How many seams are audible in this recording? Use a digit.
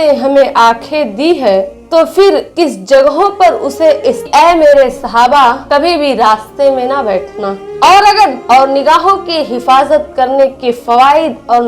3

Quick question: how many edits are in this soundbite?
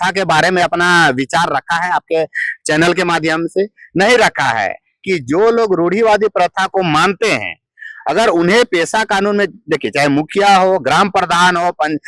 1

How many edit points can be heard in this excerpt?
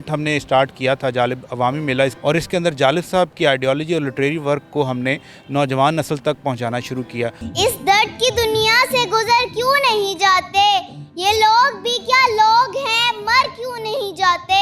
2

